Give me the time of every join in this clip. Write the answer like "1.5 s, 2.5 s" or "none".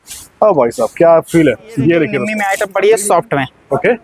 2.5 s